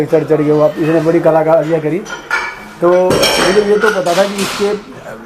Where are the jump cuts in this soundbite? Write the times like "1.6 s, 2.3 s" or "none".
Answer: none